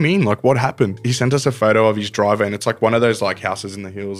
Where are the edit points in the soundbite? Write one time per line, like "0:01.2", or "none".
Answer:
0:01.0